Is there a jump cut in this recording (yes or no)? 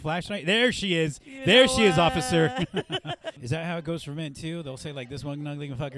yes